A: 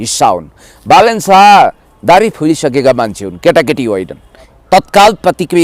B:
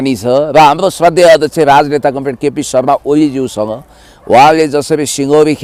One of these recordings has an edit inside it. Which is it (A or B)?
A